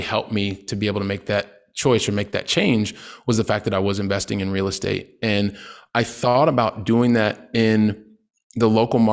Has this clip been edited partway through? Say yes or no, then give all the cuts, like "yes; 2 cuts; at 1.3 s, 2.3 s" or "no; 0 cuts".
no; 0 cuts